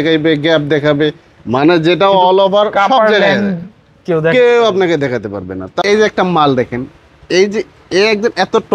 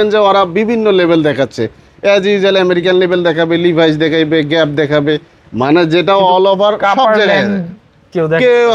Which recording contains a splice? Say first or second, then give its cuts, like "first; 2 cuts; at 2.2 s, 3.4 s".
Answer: first; 1 cut; at 5.6 s